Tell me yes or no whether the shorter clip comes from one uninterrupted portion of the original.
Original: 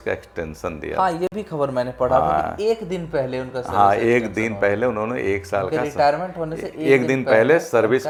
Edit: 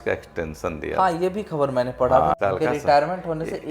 no